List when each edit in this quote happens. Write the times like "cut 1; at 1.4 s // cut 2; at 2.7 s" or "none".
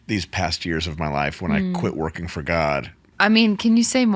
cut 1; at 3.1 s